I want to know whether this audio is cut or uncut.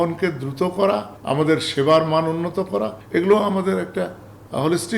cut